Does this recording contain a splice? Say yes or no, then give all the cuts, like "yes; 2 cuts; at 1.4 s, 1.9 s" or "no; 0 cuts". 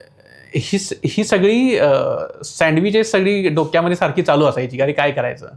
no; 0 cuts